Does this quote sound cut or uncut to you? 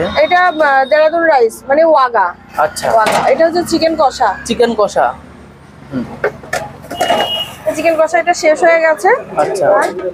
uncut